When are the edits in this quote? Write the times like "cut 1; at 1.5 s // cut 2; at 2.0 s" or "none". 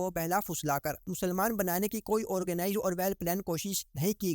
none

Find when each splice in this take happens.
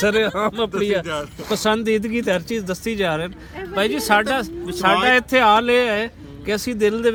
none

